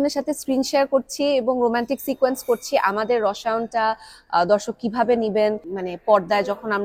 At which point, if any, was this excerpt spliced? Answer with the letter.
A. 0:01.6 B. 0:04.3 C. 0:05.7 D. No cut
C